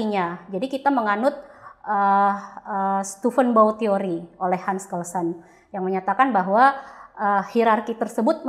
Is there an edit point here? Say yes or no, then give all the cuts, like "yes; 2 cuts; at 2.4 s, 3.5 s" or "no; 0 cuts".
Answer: no; 0 cuts